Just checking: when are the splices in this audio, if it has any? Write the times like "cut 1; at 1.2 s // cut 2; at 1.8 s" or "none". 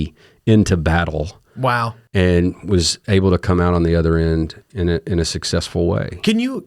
none